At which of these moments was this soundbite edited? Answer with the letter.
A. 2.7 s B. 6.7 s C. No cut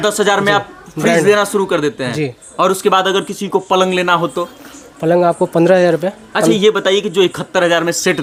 C